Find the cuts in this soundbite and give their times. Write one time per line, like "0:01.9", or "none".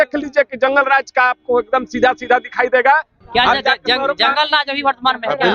0:03.2